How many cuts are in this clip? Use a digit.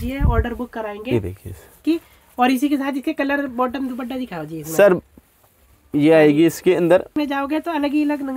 2